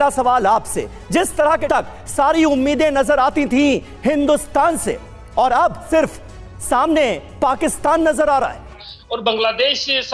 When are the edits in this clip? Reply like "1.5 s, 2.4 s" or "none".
1.6 s, 5.8 s, 8.9 s